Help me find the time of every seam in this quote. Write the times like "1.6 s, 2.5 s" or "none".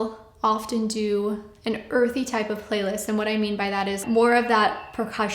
4.0 s